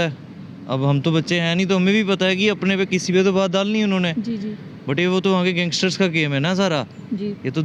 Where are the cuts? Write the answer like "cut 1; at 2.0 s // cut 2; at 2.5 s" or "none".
none